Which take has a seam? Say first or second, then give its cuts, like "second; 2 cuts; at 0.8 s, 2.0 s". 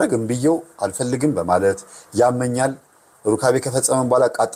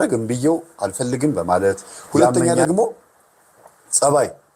second; 1 cut; at 2.3 s